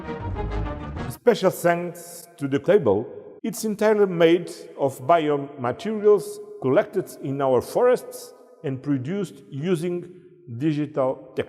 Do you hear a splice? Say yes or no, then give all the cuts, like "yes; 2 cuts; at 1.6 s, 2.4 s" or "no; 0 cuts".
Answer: yes; 3 cuts; at 1.1 s, 2.6 s, 3.2 s